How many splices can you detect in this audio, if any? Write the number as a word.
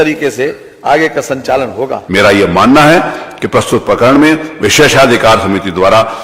one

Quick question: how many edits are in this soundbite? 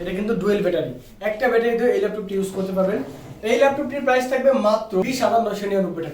one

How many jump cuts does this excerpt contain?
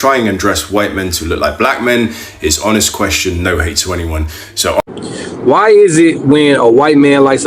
one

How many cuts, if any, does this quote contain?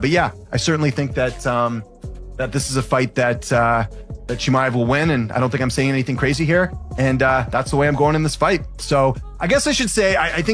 one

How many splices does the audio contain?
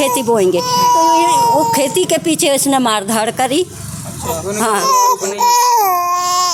zero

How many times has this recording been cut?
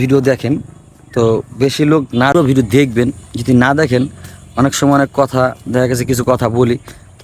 one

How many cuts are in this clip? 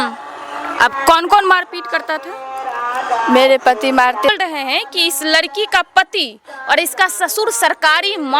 one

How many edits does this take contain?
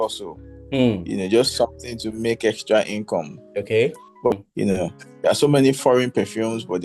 one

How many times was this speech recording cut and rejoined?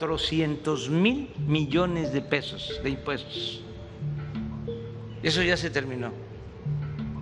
one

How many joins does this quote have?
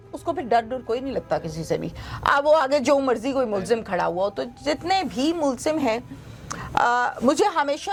zero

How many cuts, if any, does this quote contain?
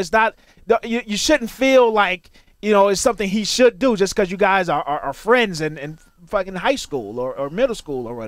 zero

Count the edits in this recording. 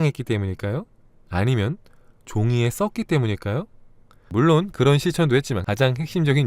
two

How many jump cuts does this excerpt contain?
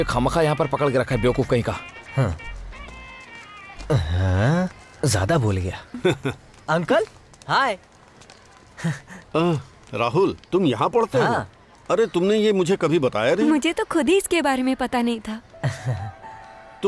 one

